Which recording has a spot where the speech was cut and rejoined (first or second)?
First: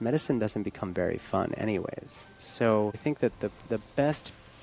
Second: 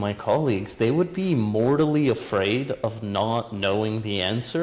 first